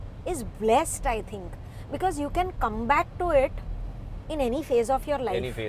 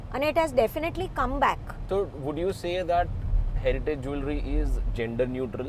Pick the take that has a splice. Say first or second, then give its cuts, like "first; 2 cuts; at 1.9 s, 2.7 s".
second; 1 cut; at 1.7 s